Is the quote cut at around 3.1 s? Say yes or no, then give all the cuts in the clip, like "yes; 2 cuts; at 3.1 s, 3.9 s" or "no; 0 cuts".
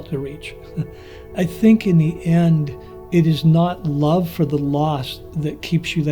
no; 1 cut; at 1.3 s